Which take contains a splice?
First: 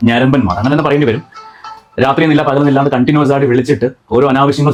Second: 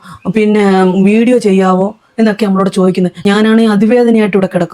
second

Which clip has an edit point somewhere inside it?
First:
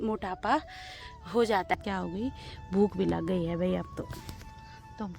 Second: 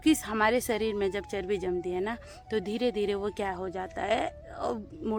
first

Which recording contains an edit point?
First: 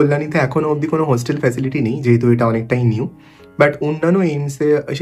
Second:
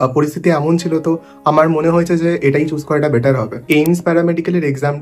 second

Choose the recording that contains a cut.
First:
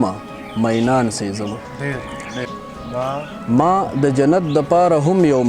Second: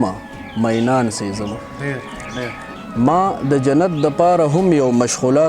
second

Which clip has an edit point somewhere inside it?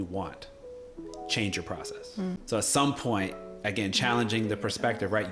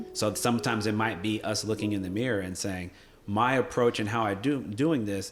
first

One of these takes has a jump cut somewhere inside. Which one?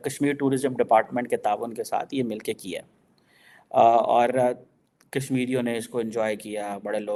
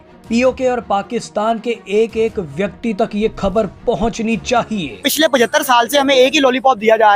second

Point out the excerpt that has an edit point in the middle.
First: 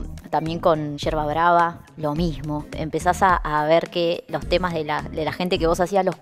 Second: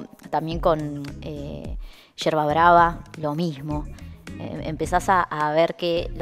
first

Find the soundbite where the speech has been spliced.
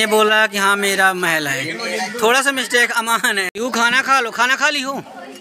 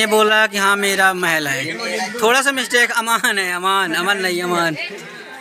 first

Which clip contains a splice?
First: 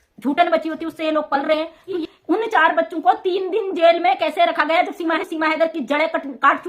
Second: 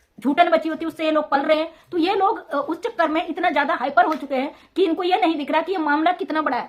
first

